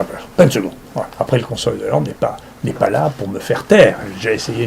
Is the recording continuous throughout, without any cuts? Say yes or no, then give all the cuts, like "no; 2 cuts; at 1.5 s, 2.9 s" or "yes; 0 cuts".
no; 1 cut; at 1.1 s